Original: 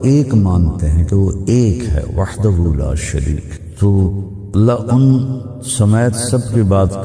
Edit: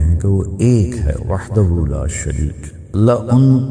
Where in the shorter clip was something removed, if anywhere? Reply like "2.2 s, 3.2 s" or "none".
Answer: 2.7 s